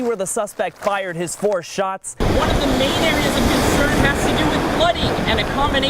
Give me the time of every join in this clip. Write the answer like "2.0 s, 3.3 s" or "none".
2.2 s